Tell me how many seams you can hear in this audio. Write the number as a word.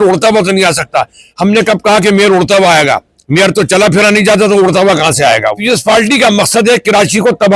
one